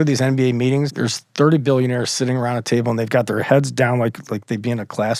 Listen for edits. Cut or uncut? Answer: cut